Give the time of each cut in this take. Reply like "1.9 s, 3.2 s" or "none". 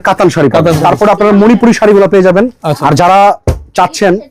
0.8 s, 2.7 s